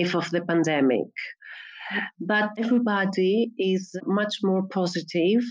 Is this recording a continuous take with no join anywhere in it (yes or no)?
no